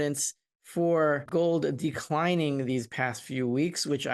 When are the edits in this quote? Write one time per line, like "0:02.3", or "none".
0:01.2